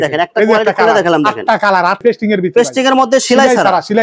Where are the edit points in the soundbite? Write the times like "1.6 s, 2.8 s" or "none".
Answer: 2.0 s

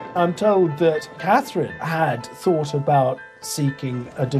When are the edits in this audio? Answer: 1.4 s

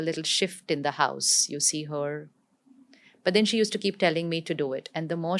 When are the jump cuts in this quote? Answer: none

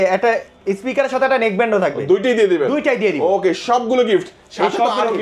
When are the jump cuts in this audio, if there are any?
none

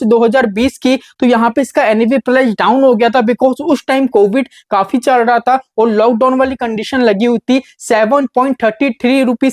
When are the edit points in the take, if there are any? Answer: none

